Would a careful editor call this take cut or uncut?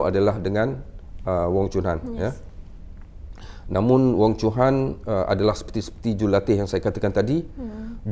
uncut